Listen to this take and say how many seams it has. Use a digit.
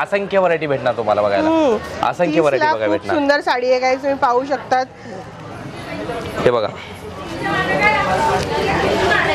0